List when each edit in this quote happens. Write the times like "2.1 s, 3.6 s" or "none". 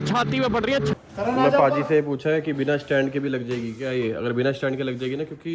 0.9 s